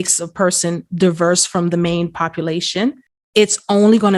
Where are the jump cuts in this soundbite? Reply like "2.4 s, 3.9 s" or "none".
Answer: 3.1 s